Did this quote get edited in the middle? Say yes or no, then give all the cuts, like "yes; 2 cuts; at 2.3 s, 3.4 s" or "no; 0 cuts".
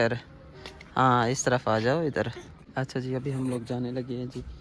no; 0 cuts